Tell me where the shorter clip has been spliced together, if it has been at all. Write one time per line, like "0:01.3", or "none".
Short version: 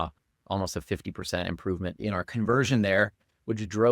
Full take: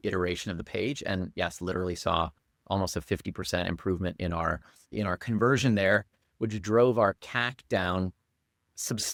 0:01.9